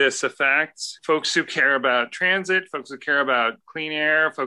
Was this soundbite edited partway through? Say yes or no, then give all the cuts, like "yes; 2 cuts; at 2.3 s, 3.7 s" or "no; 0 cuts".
yes; 1 cut; at 0.9 s